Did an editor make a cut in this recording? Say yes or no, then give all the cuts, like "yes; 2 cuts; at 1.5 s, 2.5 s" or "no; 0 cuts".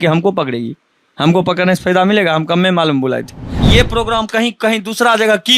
yes; 1 cut; at 3.6 s